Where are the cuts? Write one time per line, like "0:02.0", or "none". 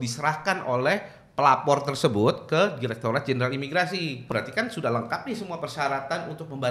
0:04.3
0:05.6